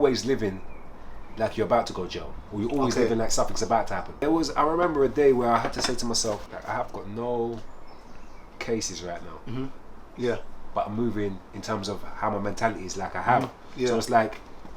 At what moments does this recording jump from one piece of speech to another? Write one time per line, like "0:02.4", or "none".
0:04.1
0:06.5